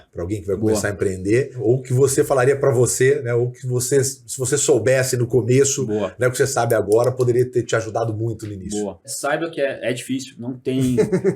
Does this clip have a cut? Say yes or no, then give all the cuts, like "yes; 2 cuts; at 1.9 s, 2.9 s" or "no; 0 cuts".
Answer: yes; 2 cuts; at 1.5 s, 9.1 s